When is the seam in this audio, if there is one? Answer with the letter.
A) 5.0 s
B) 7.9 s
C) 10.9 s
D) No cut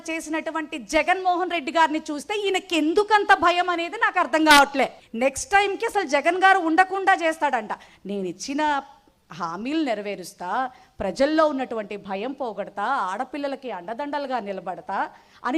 A